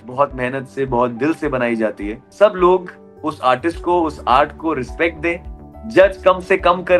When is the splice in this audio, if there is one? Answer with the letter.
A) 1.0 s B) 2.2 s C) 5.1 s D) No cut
B